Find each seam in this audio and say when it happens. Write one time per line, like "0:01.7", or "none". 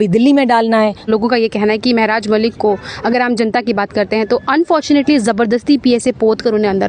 0:01.0